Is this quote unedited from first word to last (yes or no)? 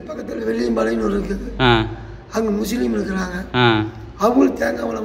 yes